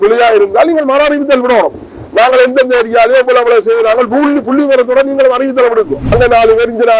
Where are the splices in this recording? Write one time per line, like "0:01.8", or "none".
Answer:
0:06.0